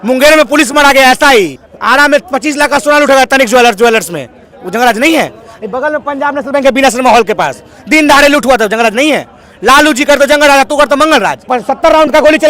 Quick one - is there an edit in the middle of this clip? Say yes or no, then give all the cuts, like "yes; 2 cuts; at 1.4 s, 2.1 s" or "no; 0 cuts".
yes; 2 cuts; at 1.6 s, 11.4 s